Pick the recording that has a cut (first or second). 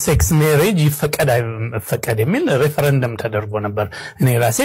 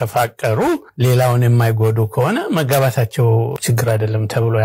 second